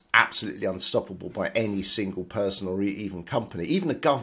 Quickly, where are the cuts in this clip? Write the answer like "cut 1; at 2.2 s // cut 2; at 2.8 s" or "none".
none